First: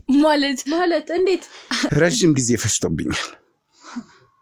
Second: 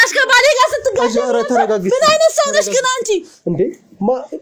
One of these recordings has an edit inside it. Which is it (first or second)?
first